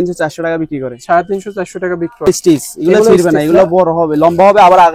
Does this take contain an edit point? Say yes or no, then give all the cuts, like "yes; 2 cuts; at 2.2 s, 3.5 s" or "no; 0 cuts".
yes; 1 cut; at 2.3 s